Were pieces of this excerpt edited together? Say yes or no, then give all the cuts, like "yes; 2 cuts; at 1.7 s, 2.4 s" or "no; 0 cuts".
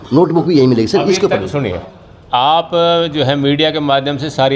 no; 0 cuts